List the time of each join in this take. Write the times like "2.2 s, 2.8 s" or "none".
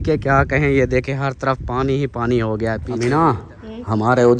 2.9 s